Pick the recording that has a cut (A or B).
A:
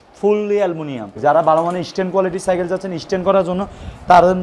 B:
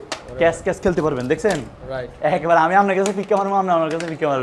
A